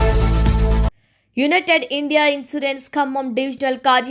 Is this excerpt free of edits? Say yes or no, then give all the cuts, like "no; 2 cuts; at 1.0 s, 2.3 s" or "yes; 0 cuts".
no; 1 cut; at 0.9 s